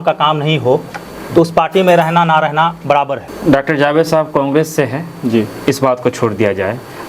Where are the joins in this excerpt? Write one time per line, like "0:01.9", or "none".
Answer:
0:03.2